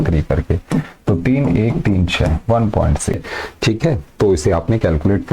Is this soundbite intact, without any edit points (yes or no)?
no